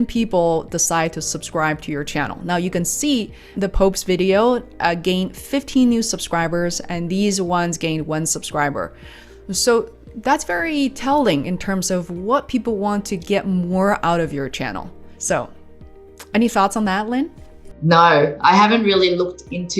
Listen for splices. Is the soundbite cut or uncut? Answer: uncut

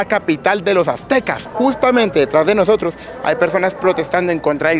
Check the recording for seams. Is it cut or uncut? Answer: cut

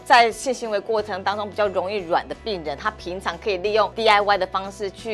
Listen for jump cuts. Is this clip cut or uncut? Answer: cut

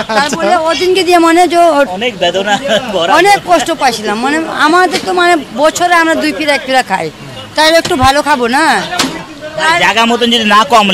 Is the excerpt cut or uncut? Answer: cut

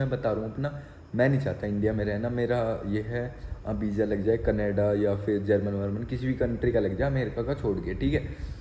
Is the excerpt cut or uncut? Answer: uncut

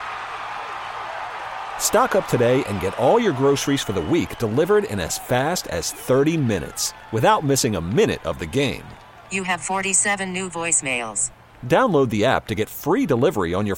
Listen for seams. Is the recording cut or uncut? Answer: uncut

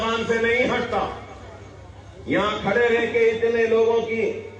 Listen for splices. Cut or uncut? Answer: uncut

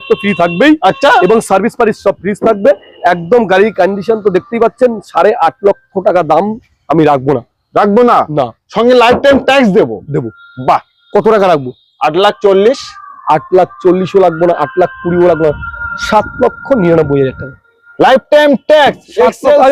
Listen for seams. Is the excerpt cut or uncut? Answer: uncut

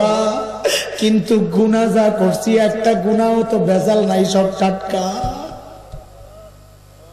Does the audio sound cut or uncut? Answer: uncut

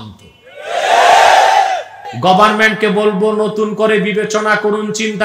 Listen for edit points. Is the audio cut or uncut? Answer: cut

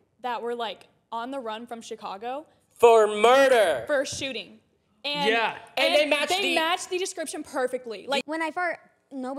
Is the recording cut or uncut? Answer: cut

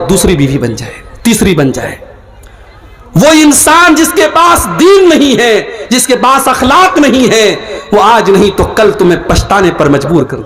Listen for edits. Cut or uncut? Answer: uncut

